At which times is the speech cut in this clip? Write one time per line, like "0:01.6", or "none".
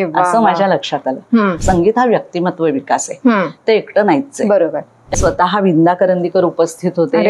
0:01.6
0:05.1